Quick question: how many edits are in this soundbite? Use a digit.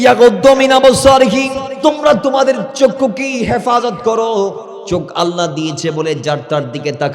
2